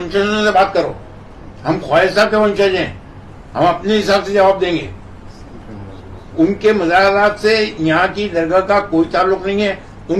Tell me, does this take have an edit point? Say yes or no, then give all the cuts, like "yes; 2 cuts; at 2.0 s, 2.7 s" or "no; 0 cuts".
no; 0 cuts